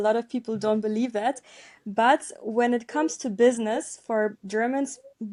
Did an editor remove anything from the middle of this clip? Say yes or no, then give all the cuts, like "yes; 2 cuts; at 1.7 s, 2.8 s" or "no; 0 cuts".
no; 0 cuts